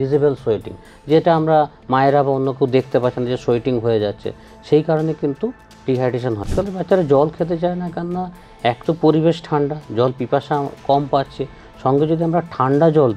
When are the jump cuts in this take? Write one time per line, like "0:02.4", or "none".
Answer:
0:06.5